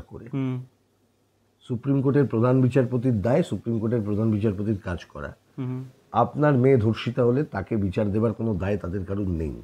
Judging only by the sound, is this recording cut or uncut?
uncut